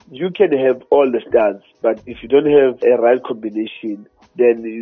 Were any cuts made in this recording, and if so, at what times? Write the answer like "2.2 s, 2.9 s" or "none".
none